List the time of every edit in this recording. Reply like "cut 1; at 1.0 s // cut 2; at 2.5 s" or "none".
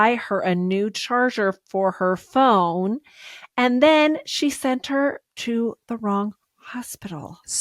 none